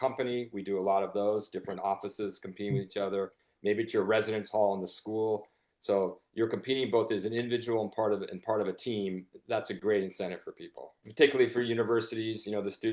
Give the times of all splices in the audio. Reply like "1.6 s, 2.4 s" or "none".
11.0 s